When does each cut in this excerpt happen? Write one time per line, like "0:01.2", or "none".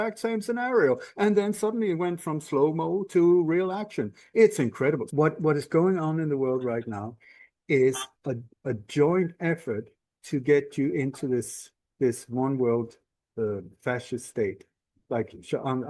0:05.0

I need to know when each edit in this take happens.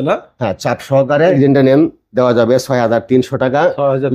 0:01.4

